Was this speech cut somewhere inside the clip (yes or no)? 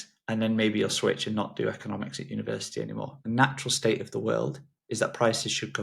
yes